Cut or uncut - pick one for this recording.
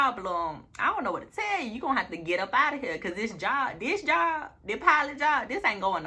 uncut